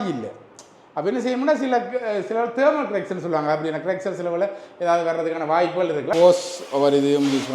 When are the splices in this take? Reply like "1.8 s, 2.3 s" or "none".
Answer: 6.1 s